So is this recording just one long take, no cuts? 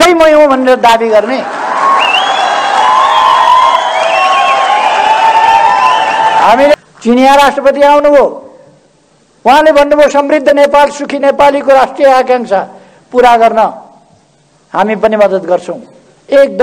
no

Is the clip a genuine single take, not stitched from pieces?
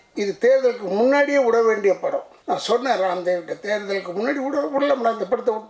no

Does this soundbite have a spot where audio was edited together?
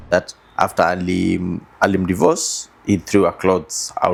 no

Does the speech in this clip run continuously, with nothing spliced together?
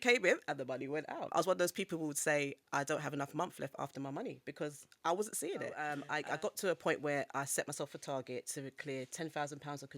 no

